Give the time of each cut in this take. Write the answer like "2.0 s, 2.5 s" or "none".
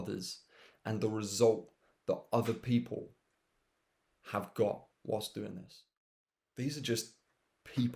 6.0 s